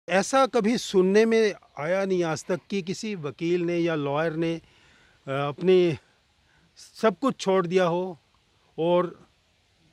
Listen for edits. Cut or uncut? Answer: uncut